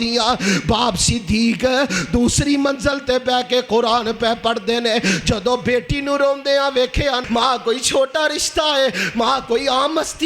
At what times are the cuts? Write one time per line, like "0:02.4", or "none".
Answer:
0:07.2